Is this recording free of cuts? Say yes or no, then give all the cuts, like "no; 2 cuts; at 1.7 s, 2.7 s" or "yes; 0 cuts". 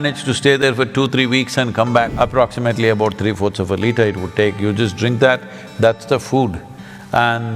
no; 1 cut; at 2.1 s